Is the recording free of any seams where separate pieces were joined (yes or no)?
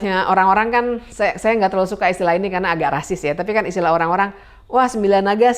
yes